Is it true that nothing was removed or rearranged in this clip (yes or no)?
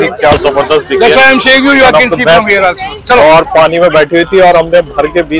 yes